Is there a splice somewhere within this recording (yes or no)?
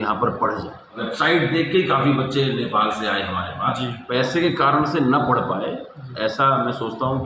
yes